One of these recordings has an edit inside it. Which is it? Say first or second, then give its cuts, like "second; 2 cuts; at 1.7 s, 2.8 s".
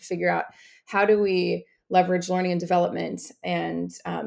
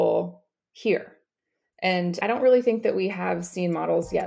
second; 1 cut; at 2.2 s